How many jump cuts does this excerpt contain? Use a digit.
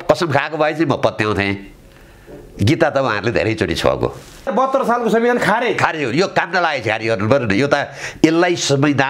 1